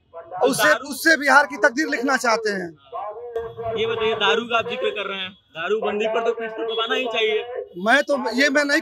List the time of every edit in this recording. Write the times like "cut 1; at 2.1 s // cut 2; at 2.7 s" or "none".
none